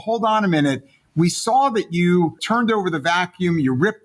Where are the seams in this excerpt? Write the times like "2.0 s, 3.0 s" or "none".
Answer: 2.4 s